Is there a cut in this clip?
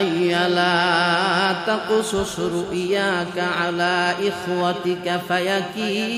no; 0 cuts

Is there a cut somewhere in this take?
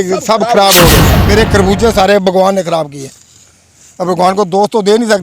yes; 1 cut; at 1.1 s

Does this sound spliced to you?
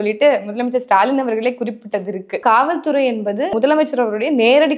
yes; 2 cuts; at 2.4 s, 3.5 s

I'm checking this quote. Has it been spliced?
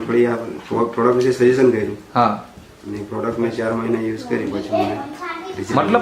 no; 0 cuts

